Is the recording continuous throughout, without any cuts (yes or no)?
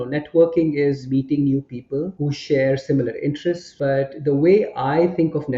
no